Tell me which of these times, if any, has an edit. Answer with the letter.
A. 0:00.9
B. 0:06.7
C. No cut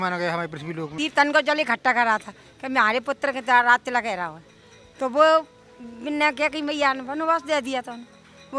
A